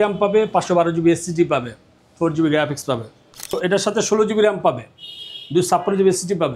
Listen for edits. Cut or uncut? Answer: cut